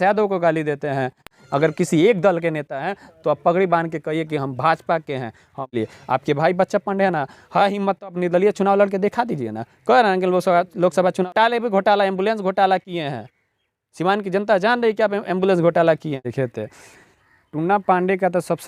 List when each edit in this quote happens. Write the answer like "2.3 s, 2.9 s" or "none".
1.3 s, 5.7 s, 11.3 s, 16.3 s